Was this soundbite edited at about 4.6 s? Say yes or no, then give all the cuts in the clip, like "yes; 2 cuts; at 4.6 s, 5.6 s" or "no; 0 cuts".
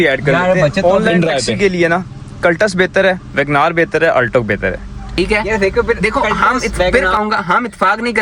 no; 2 cuts; at 1.5 s, 6.0 s